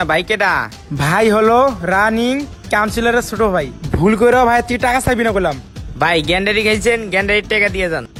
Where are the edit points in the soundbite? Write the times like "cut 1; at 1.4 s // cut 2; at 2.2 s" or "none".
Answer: none